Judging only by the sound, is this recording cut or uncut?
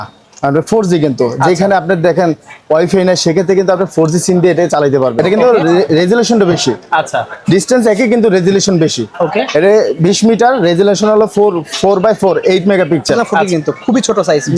cut